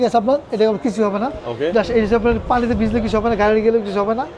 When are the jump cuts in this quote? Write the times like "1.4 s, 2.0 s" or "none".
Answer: none